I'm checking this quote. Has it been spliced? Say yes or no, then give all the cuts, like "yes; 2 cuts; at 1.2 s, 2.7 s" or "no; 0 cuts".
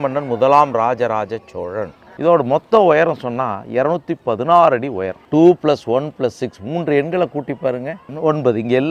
yes; 3 cuts; at 2.0 s, 5.1 s, 8.0 s